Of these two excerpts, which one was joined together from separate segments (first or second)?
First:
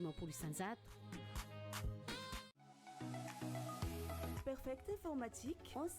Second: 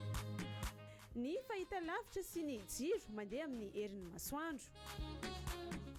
first